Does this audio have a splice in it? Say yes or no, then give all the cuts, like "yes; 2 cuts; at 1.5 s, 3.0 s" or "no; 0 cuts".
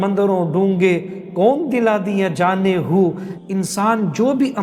yes; 1 cut; at 3.3 s